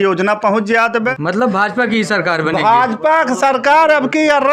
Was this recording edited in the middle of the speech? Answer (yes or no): yes